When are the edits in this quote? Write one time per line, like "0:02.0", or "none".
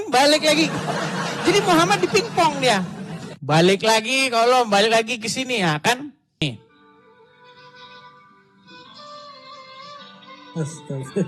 0:06.4